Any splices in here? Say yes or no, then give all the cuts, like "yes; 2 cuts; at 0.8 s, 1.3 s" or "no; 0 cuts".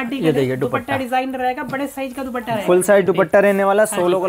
no; 0 cuts